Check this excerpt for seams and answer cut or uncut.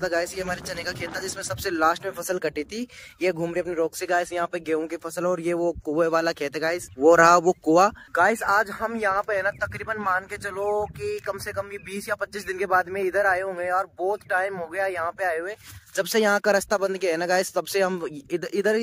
uncut